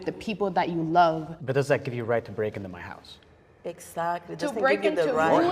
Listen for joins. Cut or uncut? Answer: cut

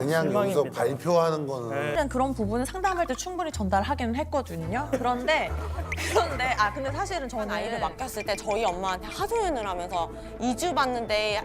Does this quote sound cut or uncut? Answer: cut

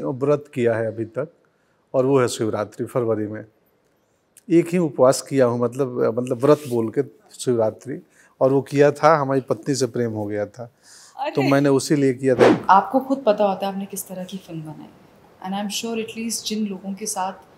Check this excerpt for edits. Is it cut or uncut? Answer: cut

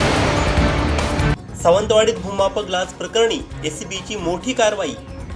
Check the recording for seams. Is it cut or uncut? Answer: cut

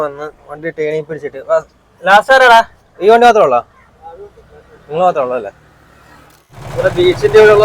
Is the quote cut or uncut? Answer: cut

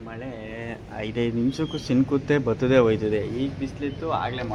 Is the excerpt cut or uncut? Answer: uncut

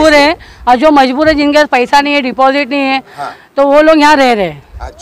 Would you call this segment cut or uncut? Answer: uncut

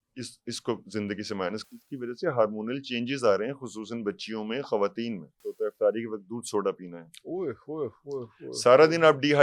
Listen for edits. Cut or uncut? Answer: cut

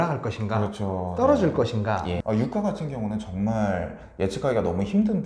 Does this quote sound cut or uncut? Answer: cut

